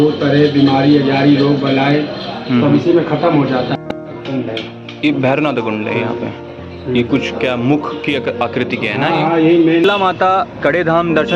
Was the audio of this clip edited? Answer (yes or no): yes